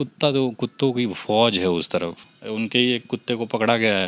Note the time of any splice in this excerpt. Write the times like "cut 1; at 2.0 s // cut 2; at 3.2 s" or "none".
cut 1; at 2.3 s